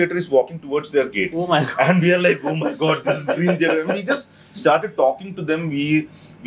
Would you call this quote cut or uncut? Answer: uncut